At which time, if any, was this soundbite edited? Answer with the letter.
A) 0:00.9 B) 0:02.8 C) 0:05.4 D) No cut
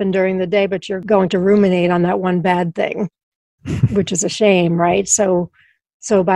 A